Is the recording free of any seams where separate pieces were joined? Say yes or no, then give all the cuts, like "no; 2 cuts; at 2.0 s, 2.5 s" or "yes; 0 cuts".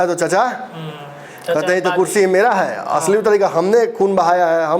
yes; 0 cuts